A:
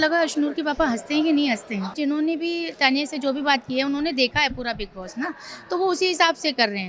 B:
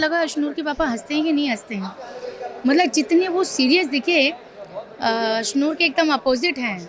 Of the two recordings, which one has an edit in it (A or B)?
A